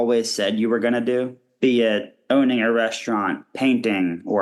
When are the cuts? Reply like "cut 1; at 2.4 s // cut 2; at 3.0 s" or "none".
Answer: cut 1; at 1.4 s // cut 2; at 2.1 s // cut 3; at 3.5 s